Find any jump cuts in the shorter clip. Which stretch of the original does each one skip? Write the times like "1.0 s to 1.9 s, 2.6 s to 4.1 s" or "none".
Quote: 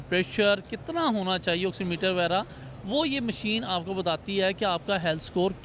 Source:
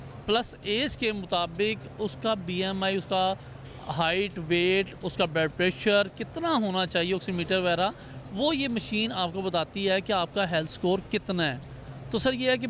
none